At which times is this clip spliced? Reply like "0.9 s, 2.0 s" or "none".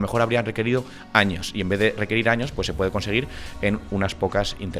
none